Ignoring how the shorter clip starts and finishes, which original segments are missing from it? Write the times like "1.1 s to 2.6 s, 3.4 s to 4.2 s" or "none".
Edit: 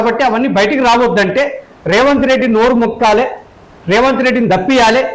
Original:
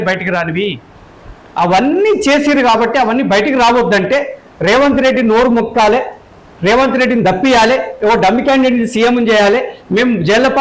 none